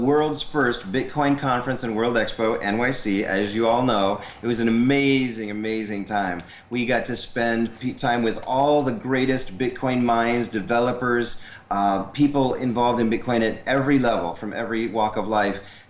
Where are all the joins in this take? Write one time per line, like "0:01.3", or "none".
0:03.0